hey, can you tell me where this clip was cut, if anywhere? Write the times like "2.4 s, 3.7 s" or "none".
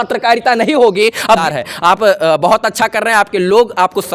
1.4 s